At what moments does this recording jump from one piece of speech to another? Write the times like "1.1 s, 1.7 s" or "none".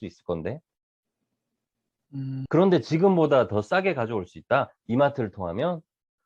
2.5 s